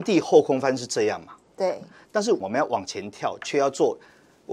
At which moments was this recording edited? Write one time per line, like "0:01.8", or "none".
0:02.4